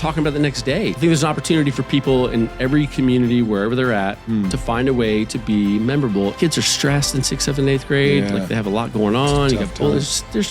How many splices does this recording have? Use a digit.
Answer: 2